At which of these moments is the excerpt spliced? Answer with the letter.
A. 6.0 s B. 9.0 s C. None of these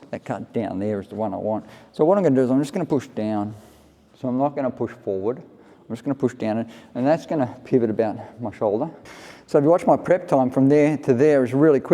B